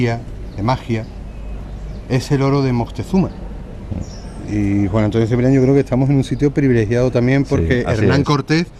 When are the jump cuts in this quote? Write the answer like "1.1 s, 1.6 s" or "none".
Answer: 7.7 s